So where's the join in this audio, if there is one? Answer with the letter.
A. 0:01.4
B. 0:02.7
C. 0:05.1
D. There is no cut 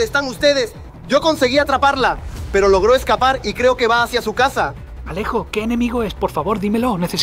C